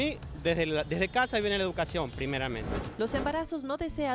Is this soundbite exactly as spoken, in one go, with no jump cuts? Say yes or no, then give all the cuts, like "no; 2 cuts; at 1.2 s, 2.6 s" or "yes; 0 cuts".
no; 1 cut; at 2.8 s